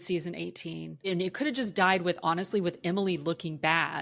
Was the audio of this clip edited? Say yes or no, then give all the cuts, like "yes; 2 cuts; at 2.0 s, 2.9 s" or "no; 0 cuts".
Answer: yes; 1 cut; at 1.1 s